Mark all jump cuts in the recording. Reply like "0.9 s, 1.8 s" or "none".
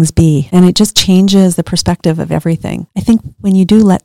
2.8 s